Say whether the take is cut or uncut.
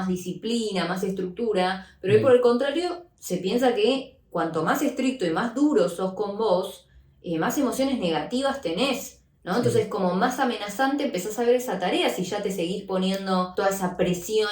cut